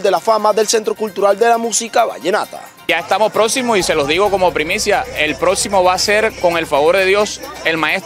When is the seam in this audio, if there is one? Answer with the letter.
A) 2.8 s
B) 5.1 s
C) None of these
A